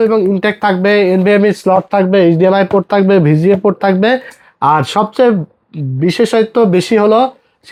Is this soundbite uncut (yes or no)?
yes